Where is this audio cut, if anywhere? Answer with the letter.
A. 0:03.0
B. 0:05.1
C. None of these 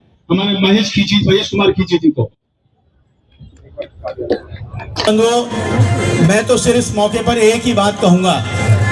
B